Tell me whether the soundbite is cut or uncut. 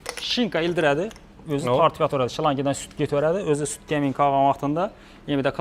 uncut